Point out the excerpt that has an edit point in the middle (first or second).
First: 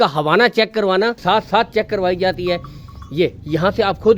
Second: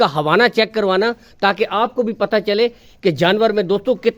first